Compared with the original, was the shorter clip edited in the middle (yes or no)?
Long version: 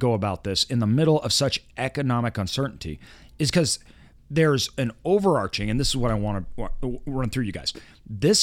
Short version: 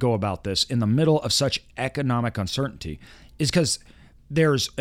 no